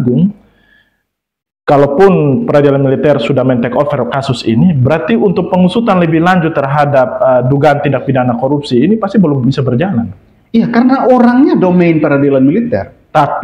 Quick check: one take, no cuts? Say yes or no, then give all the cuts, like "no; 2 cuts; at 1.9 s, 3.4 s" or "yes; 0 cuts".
yes; 0 cuts